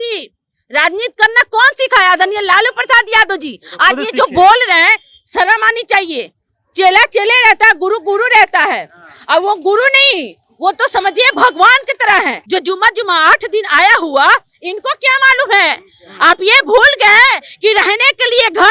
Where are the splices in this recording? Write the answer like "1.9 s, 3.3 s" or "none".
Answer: 12.4 s